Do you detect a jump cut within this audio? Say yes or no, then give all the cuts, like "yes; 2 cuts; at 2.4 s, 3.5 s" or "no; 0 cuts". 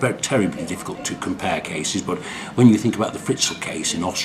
yes; 1 cut; at 2.4 s